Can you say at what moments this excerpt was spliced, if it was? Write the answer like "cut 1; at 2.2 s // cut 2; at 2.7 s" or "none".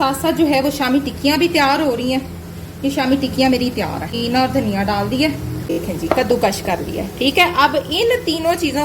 cut 1; at 4.2 s // cut 2; at 5.9 s